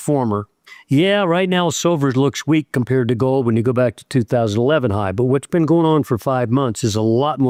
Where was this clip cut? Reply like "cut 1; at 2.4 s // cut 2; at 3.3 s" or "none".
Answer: none